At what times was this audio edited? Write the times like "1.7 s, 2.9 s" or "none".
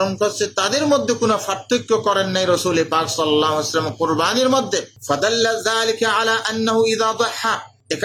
none